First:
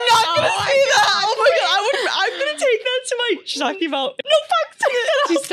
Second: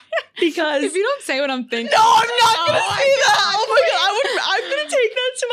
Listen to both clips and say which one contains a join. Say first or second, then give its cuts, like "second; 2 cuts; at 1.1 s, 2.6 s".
first; 1 cut; at 4.1 s